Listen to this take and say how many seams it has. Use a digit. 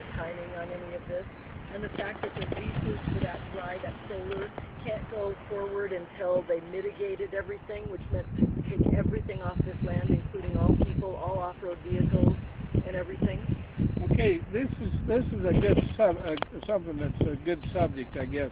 1